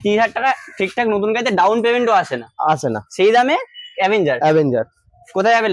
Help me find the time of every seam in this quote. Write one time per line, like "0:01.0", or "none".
none